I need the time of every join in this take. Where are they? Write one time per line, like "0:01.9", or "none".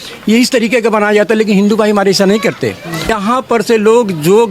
0:03.1